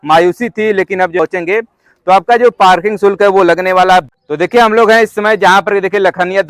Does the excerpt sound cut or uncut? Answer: cut